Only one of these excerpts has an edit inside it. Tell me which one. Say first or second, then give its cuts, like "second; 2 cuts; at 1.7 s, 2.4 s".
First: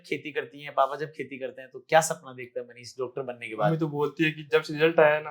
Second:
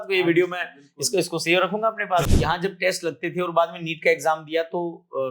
second; 1 cut; at 2.5 s